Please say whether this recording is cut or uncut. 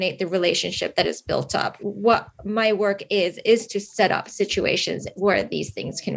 cut